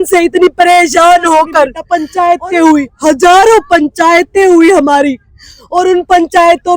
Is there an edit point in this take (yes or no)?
yes